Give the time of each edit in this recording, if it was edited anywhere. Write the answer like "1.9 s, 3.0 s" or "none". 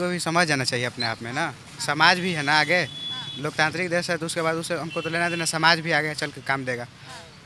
none